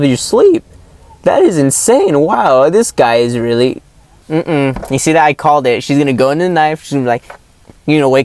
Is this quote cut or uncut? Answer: cut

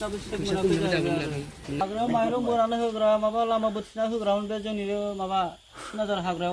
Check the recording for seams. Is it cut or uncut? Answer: cut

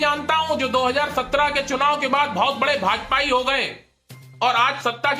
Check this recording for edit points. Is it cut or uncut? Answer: uncut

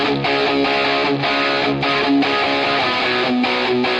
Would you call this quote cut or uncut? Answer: uncut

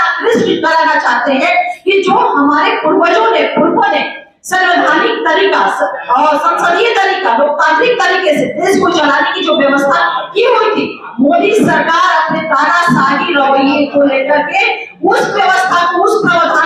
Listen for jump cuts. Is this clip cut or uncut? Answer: uncut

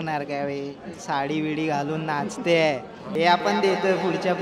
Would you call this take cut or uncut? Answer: cut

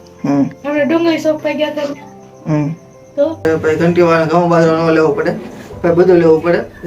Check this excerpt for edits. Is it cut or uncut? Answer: cut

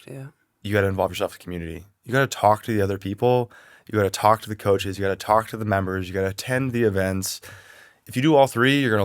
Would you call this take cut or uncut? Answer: cut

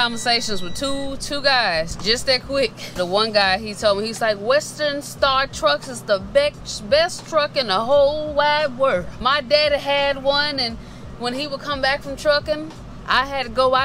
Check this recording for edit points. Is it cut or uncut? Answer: cut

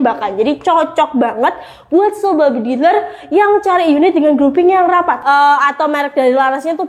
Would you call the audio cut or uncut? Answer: cut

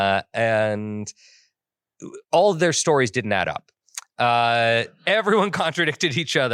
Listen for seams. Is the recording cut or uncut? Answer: uncut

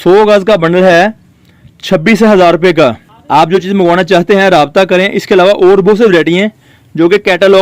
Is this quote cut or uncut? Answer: cut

